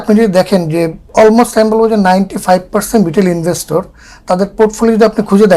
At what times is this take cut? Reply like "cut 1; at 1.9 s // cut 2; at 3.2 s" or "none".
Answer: none